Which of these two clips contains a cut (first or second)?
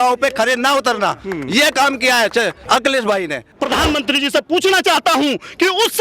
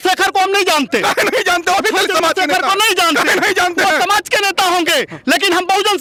first